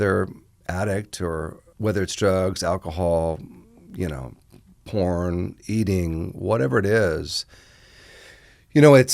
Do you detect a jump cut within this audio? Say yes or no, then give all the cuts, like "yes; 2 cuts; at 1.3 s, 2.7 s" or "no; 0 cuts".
yes; 1 cut; at 1.6 s